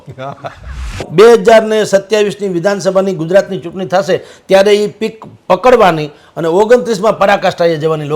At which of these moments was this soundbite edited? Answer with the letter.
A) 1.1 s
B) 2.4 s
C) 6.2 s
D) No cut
A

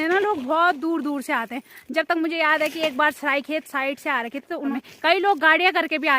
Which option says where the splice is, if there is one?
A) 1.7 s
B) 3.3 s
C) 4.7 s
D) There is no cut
C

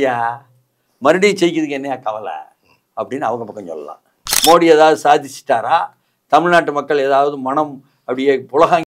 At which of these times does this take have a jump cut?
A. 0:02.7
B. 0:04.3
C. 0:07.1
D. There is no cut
B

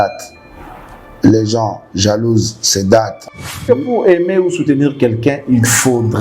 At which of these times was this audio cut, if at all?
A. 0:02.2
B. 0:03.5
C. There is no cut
B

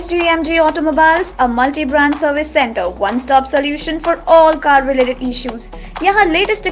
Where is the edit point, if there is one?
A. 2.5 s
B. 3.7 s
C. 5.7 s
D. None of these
D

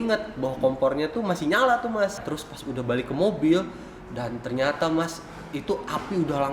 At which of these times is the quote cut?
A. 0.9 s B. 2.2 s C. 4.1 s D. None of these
B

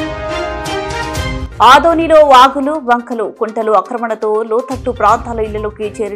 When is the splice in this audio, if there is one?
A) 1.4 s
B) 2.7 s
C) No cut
A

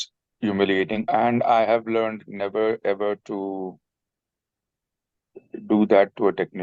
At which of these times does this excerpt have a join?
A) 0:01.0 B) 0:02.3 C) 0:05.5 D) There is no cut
A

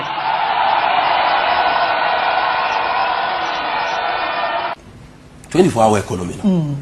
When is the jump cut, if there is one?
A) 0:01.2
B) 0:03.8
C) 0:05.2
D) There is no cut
D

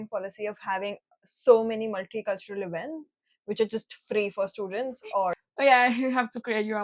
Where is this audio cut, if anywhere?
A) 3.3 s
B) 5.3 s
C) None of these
B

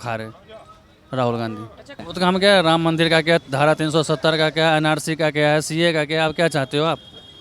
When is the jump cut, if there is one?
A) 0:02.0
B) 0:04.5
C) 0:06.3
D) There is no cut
A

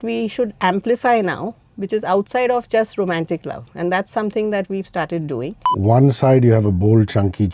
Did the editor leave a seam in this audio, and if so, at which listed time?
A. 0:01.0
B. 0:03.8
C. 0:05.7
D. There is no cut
C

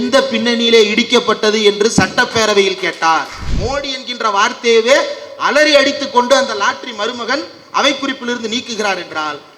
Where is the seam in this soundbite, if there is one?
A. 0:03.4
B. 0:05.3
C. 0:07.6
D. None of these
A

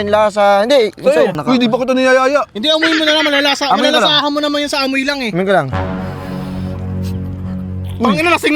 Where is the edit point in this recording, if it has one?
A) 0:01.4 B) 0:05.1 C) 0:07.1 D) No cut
A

